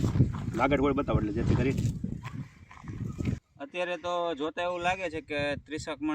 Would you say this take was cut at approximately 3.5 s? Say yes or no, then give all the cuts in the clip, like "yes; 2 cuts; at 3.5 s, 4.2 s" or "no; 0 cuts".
yes; 1 cut; at 3.5 s